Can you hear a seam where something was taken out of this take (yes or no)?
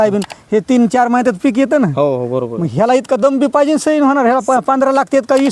no